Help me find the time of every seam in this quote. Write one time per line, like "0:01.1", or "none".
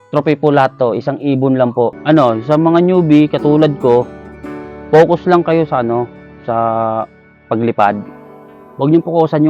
0:02.0